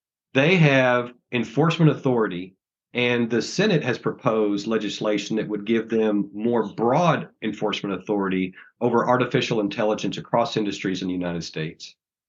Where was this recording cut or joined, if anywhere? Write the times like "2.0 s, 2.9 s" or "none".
1.2 s